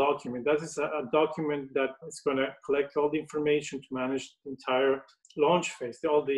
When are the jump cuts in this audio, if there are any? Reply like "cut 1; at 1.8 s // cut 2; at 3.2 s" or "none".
cut 1; at 2.1 s // cut 2; at 5.2 s